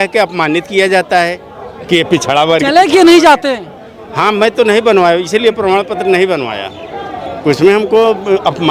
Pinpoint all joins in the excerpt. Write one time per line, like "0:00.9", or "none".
none